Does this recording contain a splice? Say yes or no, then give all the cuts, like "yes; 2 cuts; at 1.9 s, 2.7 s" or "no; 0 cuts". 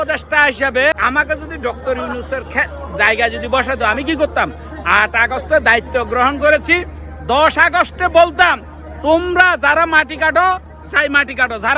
yes; 1 cut; at 0.9 s